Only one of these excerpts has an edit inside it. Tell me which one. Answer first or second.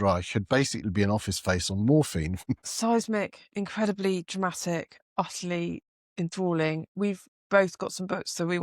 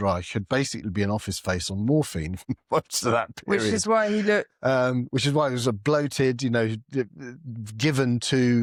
first